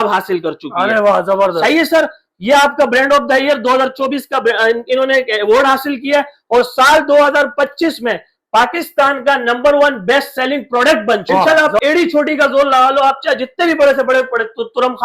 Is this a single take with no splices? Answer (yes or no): no